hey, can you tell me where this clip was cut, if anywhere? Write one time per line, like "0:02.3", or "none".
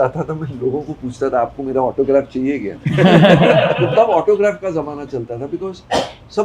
none